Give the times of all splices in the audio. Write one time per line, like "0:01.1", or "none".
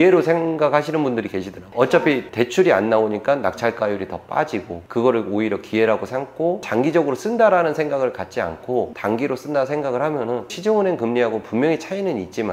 none